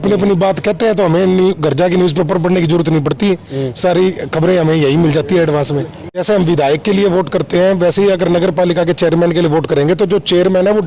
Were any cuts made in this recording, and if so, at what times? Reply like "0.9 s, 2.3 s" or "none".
6.2 s